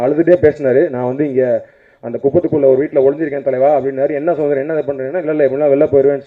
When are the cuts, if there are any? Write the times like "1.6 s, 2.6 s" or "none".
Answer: none